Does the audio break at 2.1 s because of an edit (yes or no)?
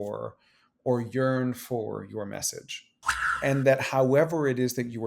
no